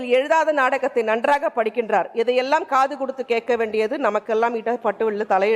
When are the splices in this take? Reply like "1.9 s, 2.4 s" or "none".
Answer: none